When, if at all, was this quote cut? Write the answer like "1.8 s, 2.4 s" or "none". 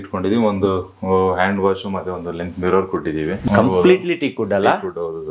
3.5 s